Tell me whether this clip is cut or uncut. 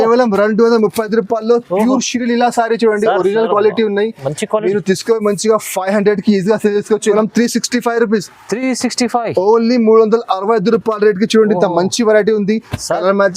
cut